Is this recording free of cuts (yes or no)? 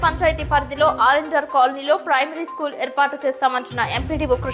yes